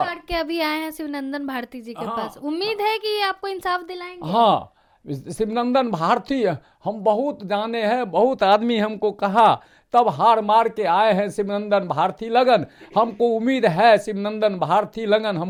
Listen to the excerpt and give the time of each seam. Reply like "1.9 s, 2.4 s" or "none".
none